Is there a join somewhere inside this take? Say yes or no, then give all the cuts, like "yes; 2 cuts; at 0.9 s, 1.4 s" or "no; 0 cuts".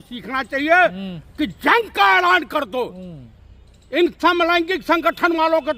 no; 0 cuts